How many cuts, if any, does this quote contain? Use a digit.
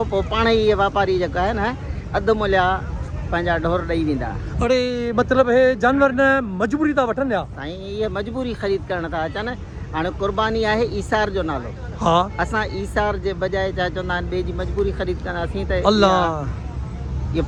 0